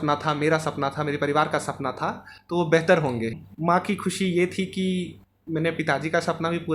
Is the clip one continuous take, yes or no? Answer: no